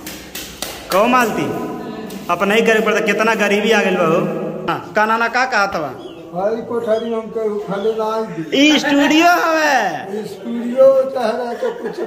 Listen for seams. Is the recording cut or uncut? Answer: cut